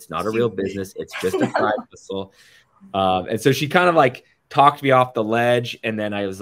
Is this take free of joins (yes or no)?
yes